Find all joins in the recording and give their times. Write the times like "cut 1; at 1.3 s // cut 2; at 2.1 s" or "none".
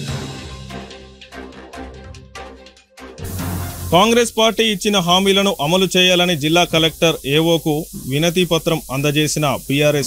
cut 1; at 0.9 s

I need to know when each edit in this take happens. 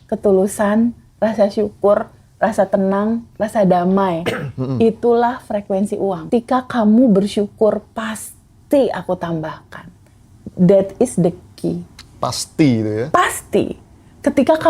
cut 1; at 6.2 s

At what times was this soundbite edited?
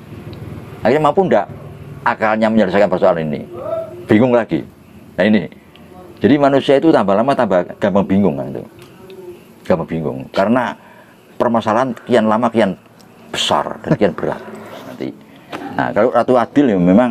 cut 1; at 15.0 s

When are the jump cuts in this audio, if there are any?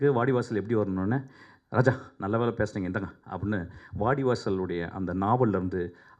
none

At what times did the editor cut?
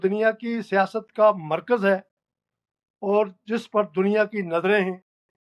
none

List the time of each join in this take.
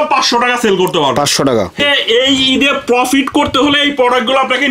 cut 1; at 1.8 s

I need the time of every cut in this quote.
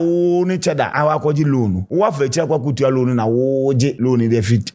cut 1; at 0.9 s // cut 2; at 1.8 s // cut 3; at 4.0 s

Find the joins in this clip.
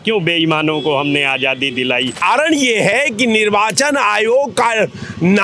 cut 1; at 2.2 s

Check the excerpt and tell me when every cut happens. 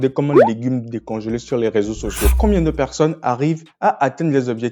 cut 1; at 2.3 s

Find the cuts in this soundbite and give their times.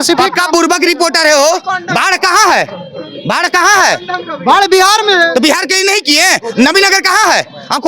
none

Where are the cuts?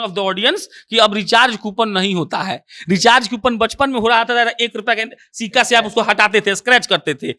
none

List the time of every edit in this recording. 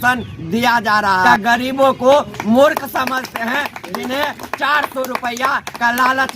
cut 1; at 1.3 s

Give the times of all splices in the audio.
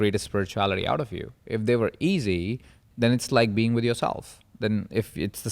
cut 1; at 2.9 s

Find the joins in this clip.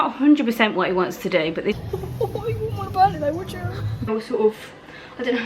cut 1; at 1.8 s // cut 2; at 4.1 s

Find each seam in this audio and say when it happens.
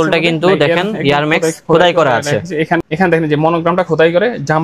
cut 1; at 2.8 s

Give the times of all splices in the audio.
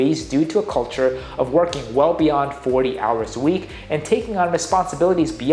none

